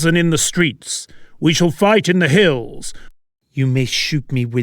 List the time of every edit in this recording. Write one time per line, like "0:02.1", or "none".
0:02.8